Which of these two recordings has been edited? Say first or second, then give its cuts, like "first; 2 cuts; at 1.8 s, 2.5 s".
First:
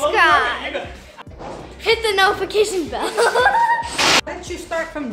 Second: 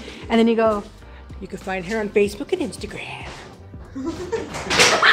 first; 2 cuts; at 1.3 s, 4.2 s